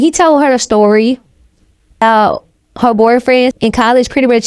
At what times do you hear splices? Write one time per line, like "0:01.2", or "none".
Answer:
0:02.0
0:03.6